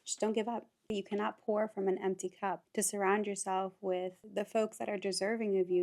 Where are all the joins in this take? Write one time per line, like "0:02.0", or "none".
0:00.9
0:02.6
0:04.2